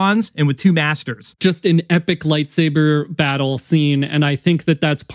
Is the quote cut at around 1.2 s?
yes; 1 cut; at 1.2 s

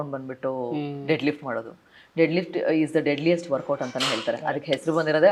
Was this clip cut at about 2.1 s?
no; 0 cuts

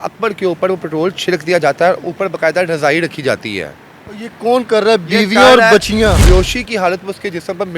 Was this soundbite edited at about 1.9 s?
no; 1 cut; at 6.2 s

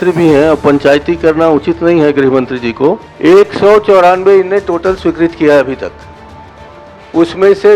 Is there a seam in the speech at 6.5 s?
no; 1 cut; at 3.1 s

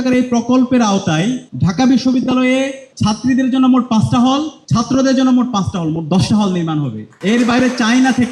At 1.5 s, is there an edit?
yes; 4 cuts; at 1.5 s, 2.8 s, 4.6 s, 7.0 s

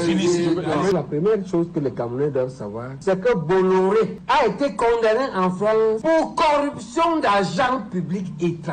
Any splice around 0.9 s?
yes; 1 cut; at 0.9 s

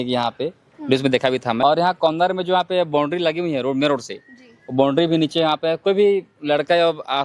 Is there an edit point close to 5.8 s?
no; 1 cut; at 1.6 s

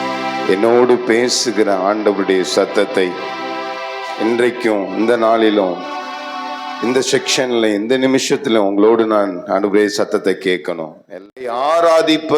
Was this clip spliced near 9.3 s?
no; 1 cut; at 10.9 s

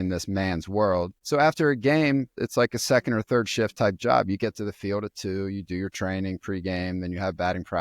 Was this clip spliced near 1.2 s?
yes; 2 cuts; at 1.2 s, 2.4 s

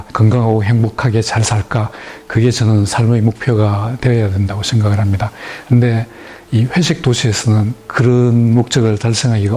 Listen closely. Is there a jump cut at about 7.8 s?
no; 0 cuts

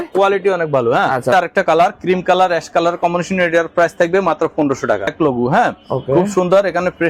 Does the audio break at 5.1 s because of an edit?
yes; 2 cuts; at 1.3 s, 5.1 s

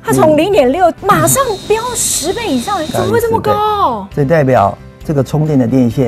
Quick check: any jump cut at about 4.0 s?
yes; 2 cuts; at 1.0 s, 4.0 s

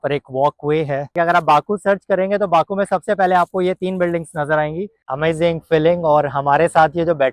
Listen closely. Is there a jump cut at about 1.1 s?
yes; 2 cuts; at 1.1 s, 5.0 s

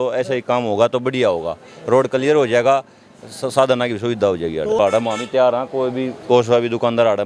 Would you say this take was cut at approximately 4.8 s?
yes; 1 cut; at 4.8 s

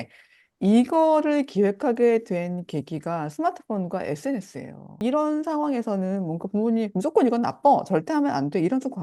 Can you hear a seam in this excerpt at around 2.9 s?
no; 1 cut; at 5.0 s

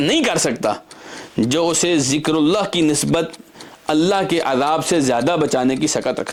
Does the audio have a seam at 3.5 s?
no; 0 cuts

